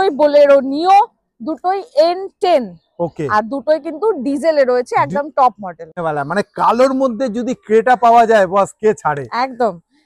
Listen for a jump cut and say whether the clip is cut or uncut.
cut